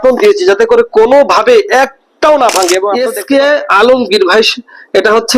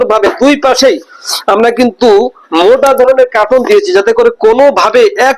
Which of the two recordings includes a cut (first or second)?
first